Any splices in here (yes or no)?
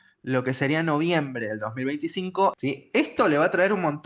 yes